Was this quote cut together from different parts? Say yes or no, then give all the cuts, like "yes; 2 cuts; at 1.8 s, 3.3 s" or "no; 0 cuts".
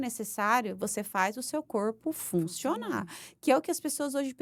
no; 0 cuts